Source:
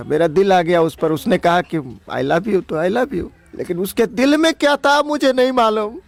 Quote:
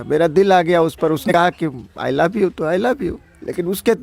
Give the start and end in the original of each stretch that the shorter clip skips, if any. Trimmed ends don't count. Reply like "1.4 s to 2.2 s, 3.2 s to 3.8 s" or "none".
1.3 s to 1.4 s

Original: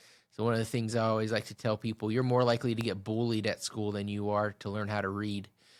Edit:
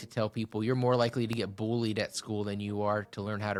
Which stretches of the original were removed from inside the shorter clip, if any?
none

